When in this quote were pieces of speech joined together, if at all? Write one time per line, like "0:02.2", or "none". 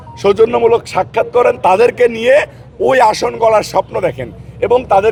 none